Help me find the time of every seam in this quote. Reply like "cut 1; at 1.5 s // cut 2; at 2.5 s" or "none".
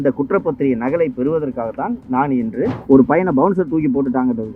cut 1; at 2.8 s